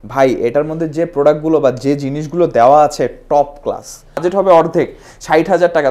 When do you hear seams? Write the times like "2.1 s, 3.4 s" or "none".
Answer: 4.2 s